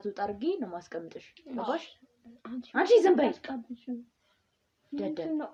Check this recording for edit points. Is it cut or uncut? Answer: uncut